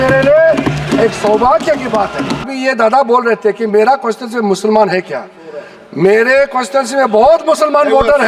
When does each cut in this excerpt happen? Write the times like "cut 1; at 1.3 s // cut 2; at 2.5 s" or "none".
cut 1; at 2.5 s